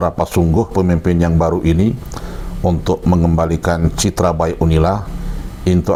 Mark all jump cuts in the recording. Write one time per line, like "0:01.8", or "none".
none